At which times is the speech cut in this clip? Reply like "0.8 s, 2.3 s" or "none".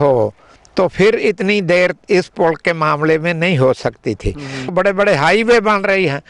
4.7 s